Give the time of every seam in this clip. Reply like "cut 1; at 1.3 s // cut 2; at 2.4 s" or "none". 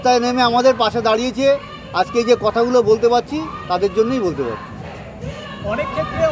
none